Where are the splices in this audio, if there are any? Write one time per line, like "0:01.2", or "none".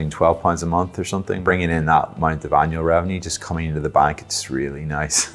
0:01.3